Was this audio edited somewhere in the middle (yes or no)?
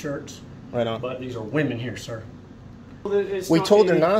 yes